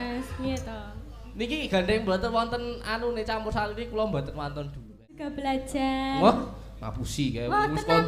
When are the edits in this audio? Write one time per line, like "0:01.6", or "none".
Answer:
0:05.3

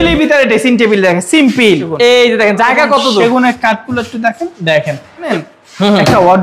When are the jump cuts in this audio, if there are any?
0:01.9
0:05.3

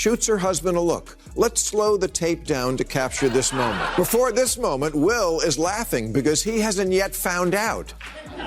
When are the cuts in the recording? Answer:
0:04.3

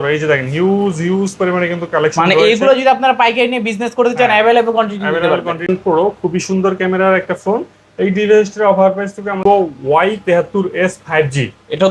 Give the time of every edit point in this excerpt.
0:05.7
0:09.4

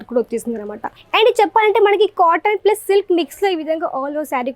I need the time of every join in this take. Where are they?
0:00.9

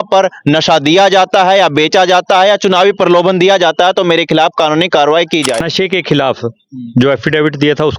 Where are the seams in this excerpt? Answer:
0:05.7

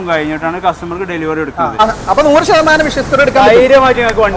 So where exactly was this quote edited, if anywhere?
0:01.8

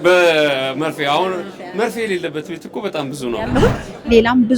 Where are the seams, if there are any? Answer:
0:03.5

